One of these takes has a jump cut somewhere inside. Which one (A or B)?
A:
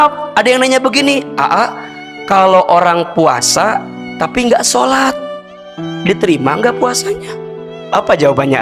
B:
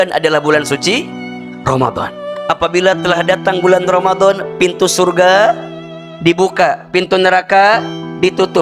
B